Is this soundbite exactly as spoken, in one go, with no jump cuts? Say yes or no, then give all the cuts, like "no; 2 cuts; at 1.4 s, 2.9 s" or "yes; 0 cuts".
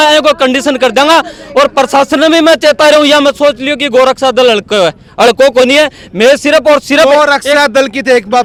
yes; 0 cuts